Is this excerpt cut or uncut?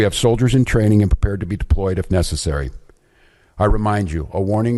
uncut